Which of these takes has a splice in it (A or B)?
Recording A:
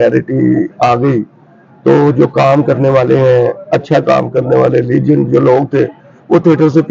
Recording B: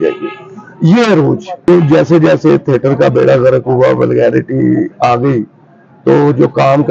B